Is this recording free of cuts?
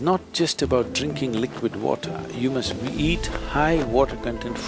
yes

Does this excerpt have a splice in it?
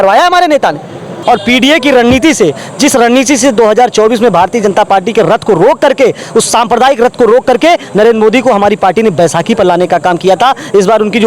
yes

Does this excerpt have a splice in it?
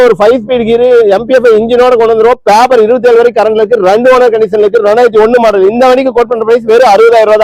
no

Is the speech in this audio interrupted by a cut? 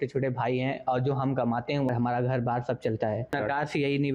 yes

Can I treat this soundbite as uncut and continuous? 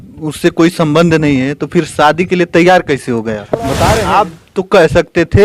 no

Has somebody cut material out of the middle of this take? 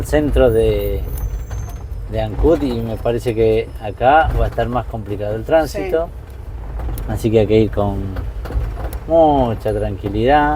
no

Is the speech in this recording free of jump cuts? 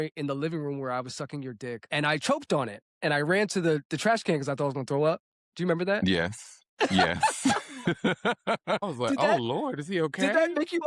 no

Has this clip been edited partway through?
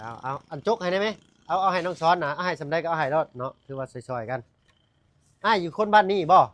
no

